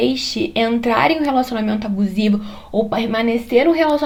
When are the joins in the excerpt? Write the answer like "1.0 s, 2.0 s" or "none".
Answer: none